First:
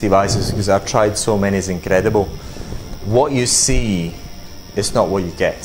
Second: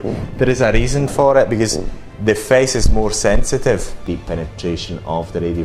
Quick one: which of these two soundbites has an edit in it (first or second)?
second